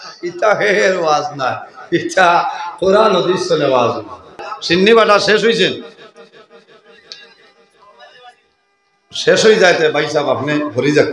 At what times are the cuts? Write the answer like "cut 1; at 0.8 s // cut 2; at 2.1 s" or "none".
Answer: cut 1; at 4.5 s